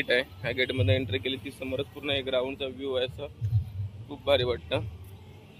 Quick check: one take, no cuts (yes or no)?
yes